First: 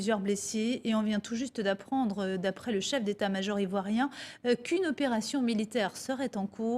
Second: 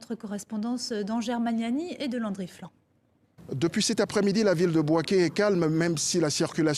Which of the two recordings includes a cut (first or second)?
first